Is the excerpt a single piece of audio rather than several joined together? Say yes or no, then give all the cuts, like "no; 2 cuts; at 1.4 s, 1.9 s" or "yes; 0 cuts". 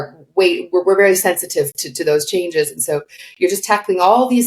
no; 1 cut; at 3.2 s